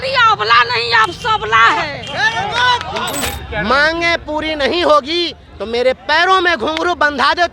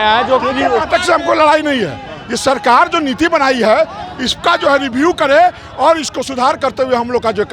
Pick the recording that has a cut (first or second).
first